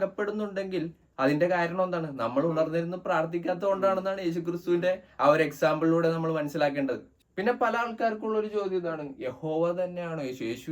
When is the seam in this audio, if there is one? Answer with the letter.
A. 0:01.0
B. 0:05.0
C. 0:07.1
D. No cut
C